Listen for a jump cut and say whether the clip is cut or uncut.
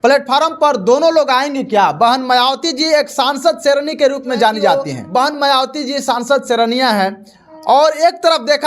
cut